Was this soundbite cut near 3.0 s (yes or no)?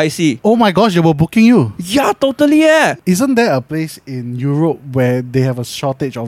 yes